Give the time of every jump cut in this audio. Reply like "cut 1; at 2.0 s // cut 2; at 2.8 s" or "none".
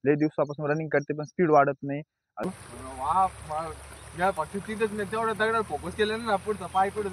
cut 1; at 2.5 s